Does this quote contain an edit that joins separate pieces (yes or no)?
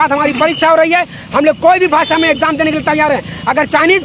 no